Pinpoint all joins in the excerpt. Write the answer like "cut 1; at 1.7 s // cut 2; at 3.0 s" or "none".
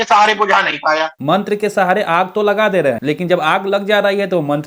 none